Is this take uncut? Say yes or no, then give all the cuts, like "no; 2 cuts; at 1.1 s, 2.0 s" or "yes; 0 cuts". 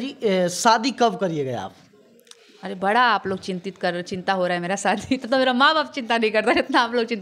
yes; 0 cuts